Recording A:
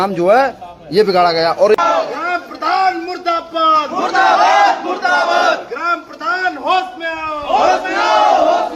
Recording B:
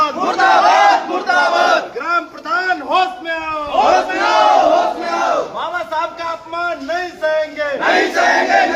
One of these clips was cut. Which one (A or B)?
A